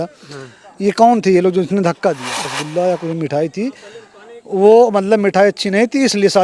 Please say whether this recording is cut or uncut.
cut